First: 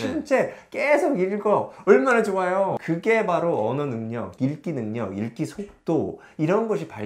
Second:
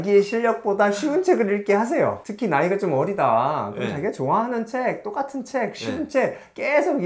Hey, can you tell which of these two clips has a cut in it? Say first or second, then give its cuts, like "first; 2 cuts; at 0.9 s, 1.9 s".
first; 1 cut; at 2.8 s